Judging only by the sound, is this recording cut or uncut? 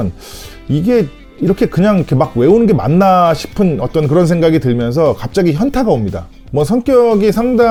uncut